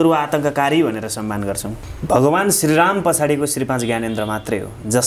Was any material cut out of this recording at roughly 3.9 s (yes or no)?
no